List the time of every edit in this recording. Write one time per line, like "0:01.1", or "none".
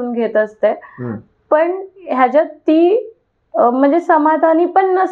none